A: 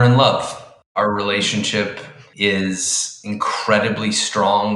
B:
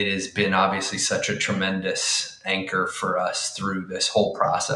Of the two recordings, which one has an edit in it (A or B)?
A